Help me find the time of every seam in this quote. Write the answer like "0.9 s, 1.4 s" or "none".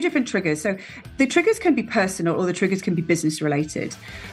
1.1 s